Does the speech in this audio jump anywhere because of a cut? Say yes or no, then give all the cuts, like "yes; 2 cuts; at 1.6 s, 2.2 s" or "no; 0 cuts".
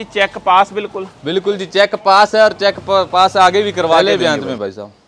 yes; 1 cut; at 4.0 s